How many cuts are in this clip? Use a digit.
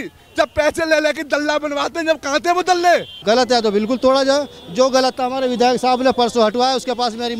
1